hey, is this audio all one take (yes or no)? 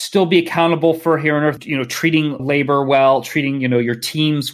no